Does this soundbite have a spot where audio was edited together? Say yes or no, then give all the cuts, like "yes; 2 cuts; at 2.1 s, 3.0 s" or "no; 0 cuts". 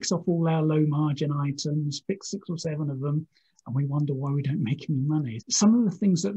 yes; 1 cut; at 5.4 s